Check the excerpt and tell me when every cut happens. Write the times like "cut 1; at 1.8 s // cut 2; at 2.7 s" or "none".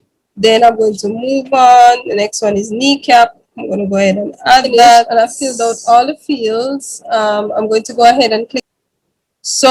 cut 1; at 5.1 s // cut 2; at 8.6 s